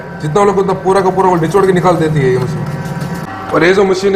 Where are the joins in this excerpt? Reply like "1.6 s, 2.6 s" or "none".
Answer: none